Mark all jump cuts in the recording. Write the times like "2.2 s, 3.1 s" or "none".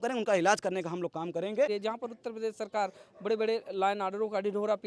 1.7 s